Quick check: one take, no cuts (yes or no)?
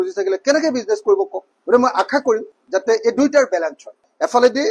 yes